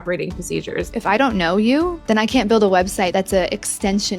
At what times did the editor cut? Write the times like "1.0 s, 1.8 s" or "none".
1.0 s, 2.0 s, 3.1 s